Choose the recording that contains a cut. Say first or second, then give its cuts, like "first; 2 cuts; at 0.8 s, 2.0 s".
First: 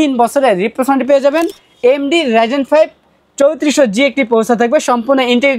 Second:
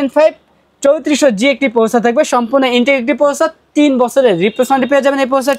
first; 1 cut; at 1.6 s